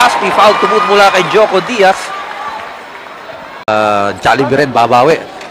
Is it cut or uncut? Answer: cut